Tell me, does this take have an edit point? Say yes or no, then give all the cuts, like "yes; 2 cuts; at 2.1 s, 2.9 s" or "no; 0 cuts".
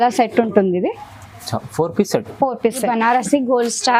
yes; 1 cut; at 2.8 s